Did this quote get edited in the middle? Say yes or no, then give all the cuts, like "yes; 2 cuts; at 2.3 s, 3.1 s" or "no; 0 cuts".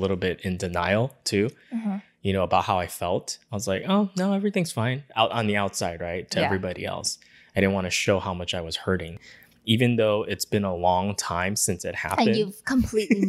yes; 1 cut; at 9.3 s